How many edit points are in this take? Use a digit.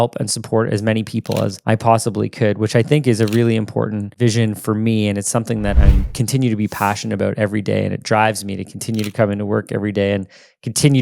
1